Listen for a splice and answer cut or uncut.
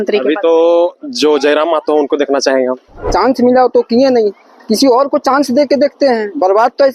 cut